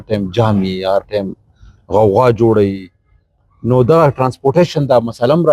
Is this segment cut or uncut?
uncut